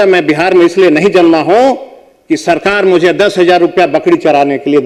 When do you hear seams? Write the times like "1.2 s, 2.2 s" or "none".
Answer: none